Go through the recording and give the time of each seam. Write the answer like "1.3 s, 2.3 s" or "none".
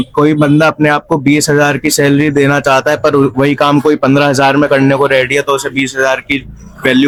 none